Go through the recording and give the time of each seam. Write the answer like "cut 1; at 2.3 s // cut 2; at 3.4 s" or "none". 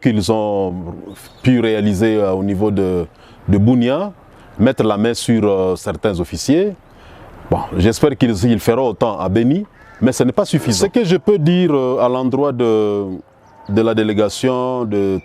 cut 1; at 10.8 s